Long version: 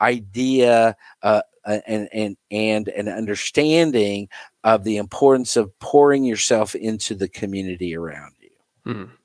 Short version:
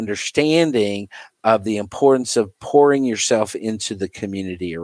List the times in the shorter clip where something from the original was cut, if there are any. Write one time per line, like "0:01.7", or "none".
none